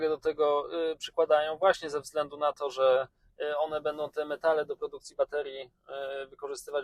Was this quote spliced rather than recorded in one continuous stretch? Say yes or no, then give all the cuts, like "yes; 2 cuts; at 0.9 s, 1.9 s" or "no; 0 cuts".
no; 0 cuts